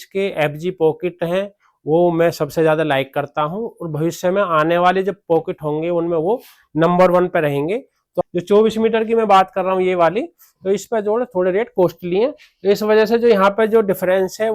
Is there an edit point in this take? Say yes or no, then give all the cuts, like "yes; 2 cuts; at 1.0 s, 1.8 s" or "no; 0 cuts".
yes; 1 cut; at 8.1 s